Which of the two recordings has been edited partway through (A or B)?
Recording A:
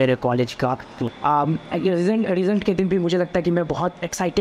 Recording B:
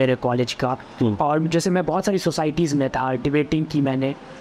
A